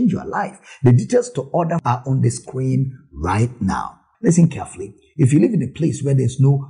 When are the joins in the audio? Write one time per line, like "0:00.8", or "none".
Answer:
0:04.0